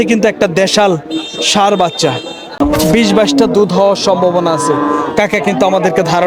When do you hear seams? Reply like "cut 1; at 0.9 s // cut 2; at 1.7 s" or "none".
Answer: cut 1; at 2.6 s